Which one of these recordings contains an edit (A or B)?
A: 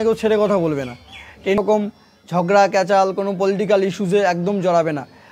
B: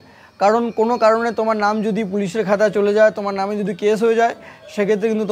A